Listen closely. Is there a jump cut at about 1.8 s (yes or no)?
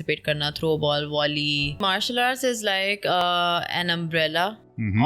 yes